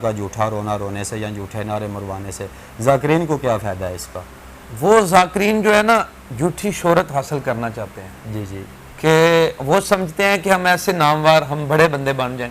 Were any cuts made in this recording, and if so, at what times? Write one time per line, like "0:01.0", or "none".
none